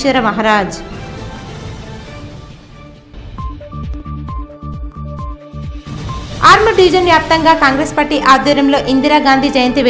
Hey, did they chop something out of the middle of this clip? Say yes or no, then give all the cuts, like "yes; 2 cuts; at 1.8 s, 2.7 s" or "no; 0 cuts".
no; 0 cuts